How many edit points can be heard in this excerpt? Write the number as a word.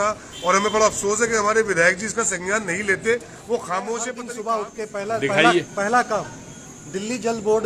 one